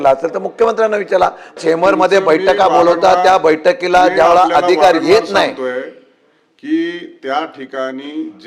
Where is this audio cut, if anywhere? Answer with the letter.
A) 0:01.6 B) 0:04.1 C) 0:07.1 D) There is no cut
A